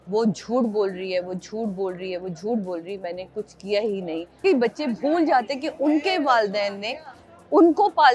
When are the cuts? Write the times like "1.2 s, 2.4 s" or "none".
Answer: 4.4 s